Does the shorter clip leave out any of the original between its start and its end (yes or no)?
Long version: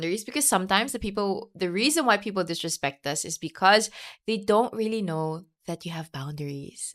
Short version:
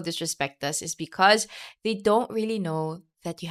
no